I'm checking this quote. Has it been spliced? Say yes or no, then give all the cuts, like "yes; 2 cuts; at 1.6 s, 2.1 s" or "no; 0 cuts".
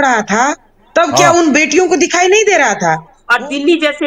yes; 1 cut; at 3.2 s